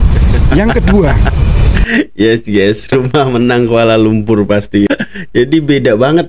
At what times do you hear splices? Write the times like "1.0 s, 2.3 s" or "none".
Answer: 4.9 s